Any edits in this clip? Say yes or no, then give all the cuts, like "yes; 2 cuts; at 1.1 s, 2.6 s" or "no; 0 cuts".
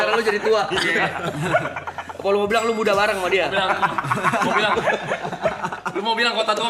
no; 0 cuts